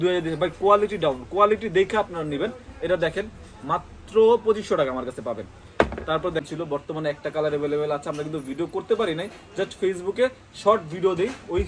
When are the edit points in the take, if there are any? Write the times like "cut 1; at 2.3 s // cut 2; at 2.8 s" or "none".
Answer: cut 1; at 6.5 s